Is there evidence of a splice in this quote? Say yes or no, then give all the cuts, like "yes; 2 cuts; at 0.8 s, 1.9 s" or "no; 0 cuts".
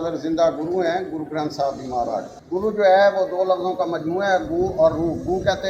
yes; 1 cut; at 2.4 s